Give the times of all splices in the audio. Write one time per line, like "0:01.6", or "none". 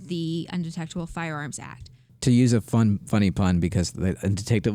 0:02.0